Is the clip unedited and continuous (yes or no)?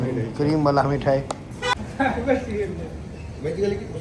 no